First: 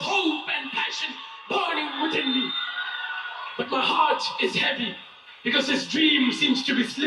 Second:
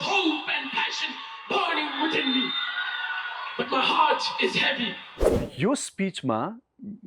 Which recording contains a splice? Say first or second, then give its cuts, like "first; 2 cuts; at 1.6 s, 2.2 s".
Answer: second; 1 cut; at 5.3 s